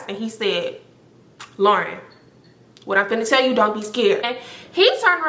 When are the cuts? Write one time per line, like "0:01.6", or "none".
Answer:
0:04.3